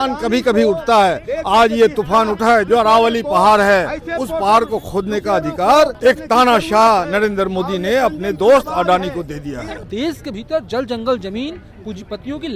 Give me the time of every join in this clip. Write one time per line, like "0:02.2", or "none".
0:02.6
0:06.0
0:09.8